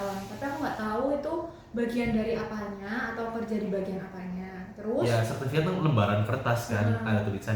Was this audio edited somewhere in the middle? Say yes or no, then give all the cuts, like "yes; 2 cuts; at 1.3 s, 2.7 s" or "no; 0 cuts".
yes; 1 cut; at 5.1 s